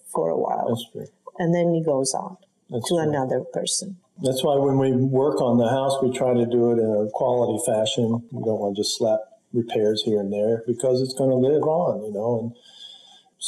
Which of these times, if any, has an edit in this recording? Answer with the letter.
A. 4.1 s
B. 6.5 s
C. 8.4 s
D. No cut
A